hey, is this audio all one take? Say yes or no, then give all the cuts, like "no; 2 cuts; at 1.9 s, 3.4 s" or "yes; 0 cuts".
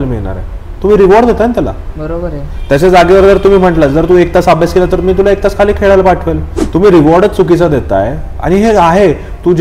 no; 1 cut; at 6.5 s